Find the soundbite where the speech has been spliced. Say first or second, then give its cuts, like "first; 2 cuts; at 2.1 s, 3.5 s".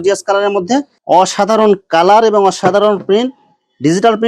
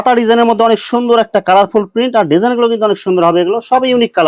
first; 1 cut; at 0.9 s